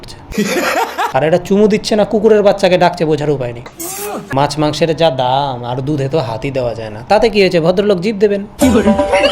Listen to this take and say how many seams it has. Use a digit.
2